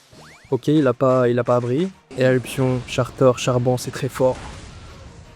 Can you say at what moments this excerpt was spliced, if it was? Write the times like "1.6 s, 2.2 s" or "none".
2.0 s